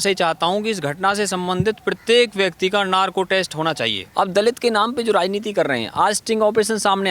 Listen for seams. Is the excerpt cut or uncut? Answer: cut